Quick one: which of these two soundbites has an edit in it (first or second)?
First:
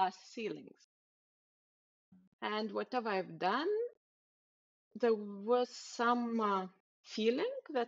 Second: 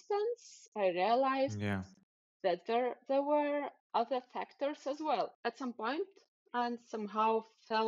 second